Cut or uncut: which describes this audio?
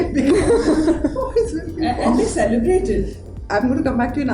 uncut